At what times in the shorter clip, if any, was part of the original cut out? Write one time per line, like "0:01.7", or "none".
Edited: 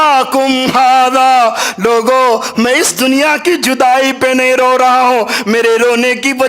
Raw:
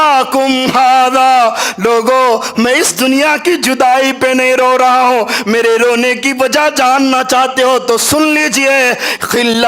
none